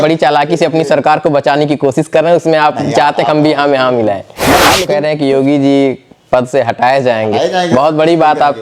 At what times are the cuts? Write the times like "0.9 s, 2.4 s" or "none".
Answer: 4.6 s